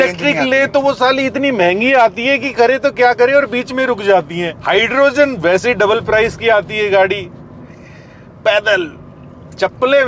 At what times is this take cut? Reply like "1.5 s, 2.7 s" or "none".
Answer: 4.5 s